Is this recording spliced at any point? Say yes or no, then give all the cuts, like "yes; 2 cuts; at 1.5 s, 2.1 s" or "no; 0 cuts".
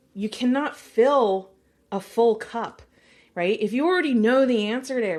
no; 0 cuts